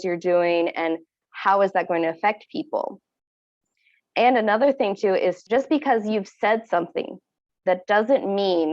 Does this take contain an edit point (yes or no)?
yes